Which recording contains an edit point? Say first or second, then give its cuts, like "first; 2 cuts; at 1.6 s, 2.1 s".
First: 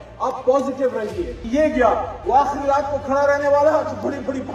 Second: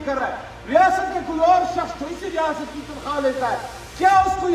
first; 1 cut; at 1.4 s